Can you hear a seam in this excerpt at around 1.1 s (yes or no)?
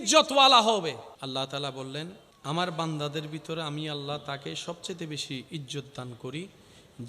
yes